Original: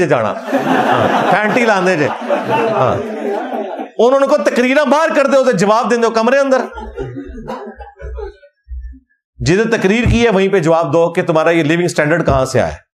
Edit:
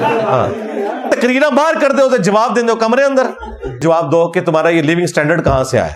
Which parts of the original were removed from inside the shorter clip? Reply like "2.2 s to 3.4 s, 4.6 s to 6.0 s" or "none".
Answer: 3.5 s to 4.4 s, 7.2 s to 10.6 s

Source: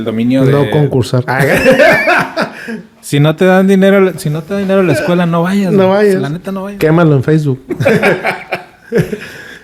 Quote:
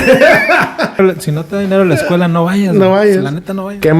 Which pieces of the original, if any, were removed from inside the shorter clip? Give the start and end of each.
2.6 s to 4.0 s

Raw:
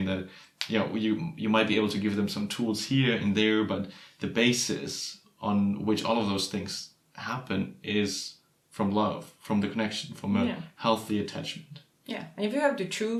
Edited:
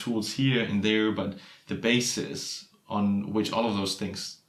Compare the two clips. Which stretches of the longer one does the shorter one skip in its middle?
none

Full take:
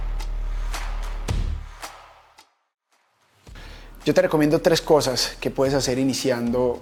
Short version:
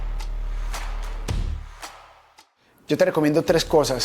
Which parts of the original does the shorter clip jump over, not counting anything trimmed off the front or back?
2.7 s to 3.9 s

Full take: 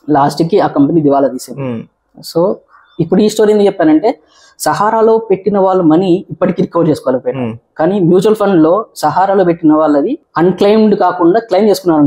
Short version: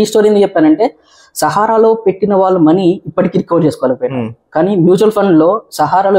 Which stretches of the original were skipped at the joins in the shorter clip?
none

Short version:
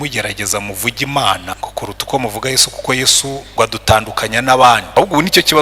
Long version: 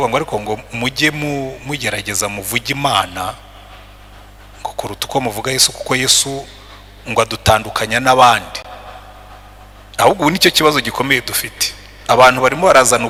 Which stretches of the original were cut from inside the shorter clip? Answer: 3.2 s to 4.5 s, 6.5 s to 7.0 s, 8.5 s to 10.0 s

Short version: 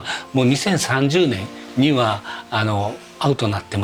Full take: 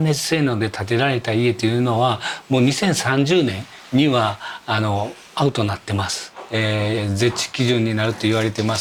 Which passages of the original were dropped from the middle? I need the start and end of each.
none

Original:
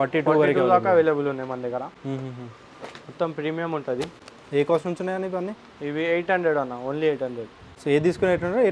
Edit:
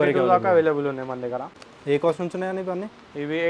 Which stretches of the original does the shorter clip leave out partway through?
2.0 s to 4.2 s

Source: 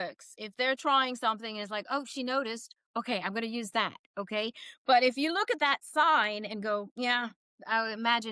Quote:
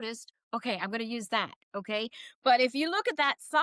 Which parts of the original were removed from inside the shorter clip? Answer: none

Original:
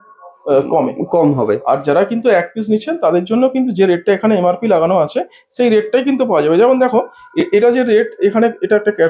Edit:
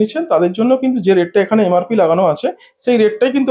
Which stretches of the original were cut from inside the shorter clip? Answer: none

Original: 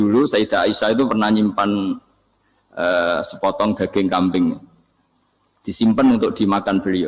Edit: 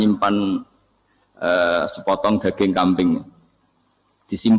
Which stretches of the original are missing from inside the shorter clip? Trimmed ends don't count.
none

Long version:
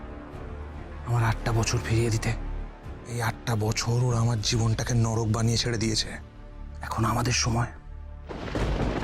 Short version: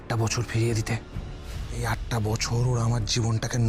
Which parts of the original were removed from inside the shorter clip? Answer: none

